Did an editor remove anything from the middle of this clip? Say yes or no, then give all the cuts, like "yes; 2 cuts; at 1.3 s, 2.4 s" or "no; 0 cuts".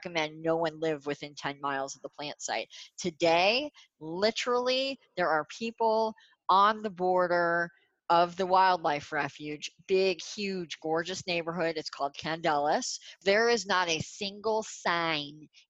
yes; 1 cut; at 13.2 s